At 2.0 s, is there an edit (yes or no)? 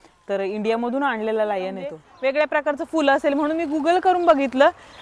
yes